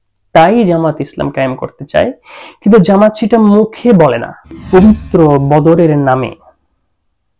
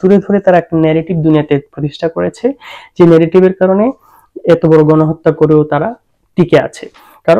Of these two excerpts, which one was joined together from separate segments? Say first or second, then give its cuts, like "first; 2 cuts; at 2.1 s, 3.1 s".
first; 1 cut; at 4.6 s